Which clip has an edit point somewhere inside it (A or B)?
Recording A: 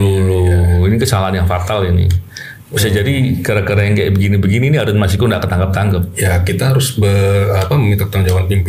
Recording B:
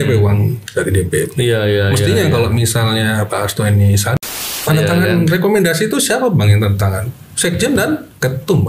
B